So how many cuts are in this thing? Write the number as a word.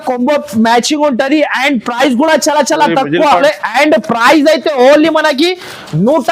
one